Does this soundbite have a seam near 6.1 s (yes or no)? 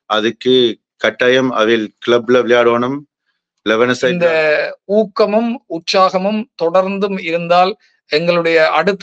no